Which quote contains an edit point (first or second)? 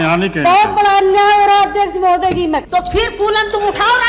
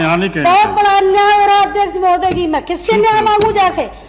first